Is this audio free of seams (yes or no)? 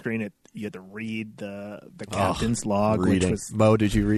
yes